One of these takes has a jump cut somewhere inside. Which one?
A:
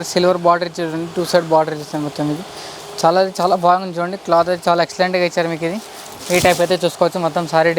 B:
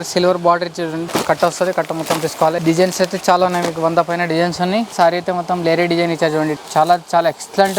B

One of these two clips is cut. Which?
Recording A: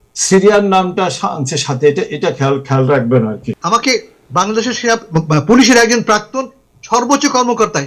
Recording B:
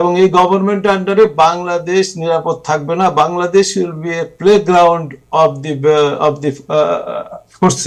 A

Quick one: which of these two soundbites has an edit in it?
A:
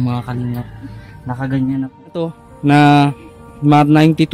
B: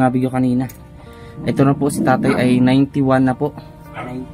A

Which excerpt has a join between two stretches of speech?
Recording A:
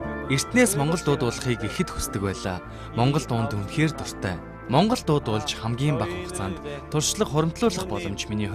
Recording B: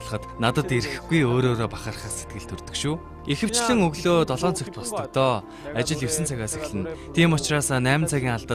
A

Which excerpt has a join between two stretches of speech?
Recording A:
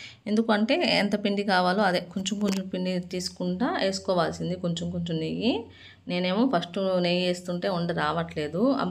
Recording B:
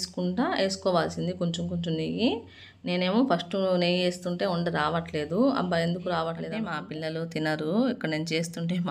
B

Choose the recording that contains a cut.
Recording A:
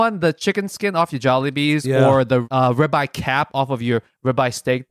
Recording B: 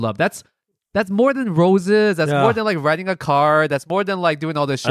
A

